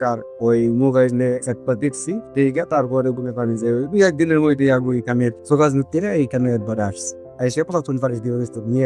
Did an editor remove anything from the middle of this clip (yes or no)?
no